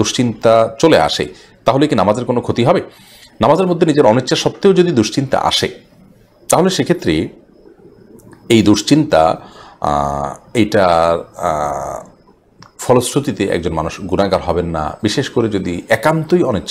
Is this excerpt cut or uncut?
uncut